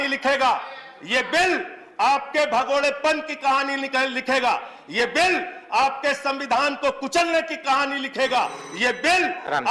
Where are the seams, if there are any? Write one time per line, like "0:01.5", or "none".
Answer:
none